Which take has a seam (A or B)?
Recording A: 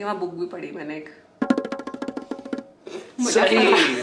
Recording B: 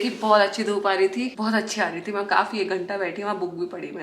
B